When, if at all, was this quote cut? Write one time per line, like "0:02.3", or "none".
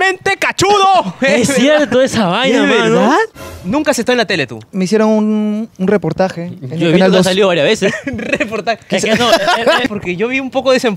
0:03.6
0:04.7
0:09.8